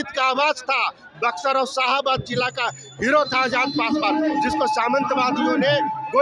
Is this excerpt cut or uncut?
uncut